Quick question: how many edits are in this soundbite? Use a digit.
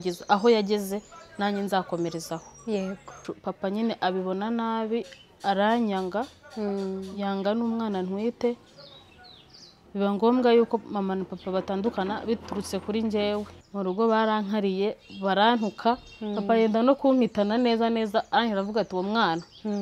2